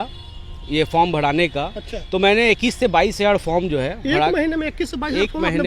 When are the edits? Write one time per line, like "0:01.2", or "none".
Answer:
none